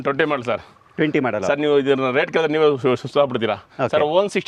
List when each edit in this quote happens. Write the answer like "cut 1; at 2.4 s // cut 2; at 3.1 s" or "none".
none